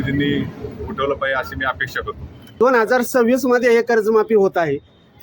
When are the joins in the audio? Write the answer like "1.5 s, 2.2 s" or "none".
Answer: 2.4 s